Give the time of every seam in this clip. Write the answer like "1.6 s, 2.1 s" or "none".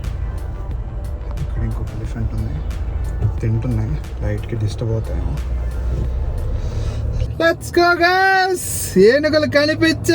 7.3 s